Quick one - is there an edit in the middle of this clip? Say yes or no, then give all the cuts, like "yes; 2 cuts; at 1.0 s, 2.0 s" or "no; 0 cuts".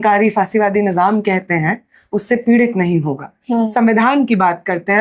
yes; 1 cut; at 3.7 s